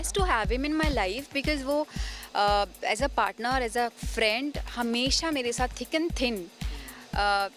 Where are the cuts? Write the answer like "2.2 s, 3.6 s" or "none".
none